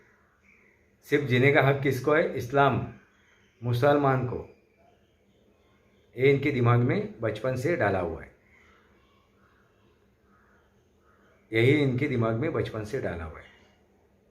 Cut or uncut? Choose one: uncut